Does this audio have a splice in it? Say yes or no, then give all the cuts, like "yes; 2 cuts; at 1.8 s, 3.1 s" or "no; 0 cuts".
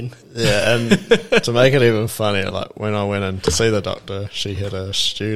no; 0 cuts